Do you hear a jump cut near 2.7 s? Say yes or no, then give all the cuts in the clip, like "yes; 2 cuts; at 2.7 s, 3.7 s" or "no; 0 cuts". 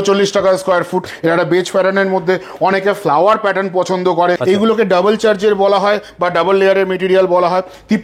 no; 2 cuts; at 1.1 s, 4.4 s